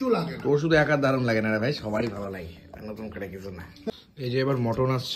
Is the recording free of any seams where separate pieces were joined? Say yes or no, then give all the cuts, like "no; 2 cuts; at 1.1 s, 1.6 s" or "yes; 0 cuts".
no; 1 cut; at 3.9 s